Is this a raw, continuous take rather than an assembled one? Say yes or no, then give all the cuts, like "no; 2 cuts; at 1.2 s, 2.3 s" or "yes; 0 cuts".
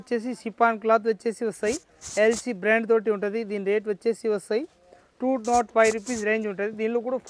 yes; 0 cuts